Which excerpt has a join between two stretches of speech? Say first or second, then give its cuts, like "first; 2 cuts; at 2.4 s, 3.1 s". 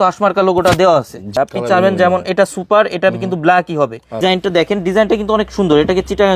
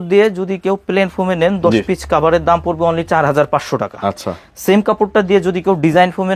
first; 2 cuts; at 1.3 s, 4.2 s